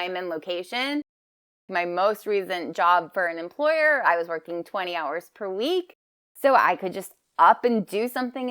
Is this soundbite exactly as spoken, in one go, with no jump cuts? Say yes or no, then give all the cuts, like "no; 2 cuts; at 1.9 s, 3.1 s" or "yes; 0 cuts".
no; 1 cut; at 1.6 s